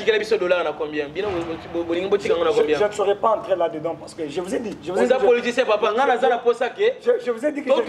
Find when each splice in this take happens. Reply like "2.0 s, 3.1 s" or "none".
none

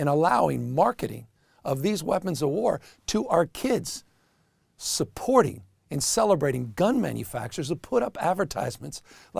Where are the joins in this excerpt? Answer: 1.6 s

